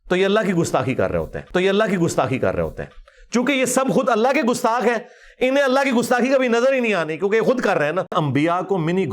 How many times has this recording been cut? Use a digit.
1